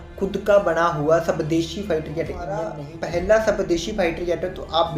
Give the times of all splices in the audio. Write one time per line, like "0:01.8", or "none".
0:02.8